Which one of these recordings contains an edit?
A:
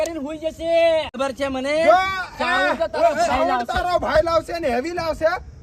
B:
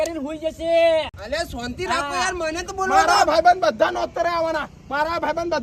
A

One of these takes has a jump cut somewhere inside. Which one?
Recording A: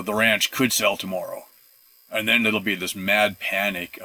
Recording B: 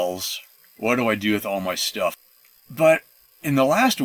B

